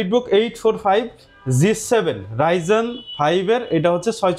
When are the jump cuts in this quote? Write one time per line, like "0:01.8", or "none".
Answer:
none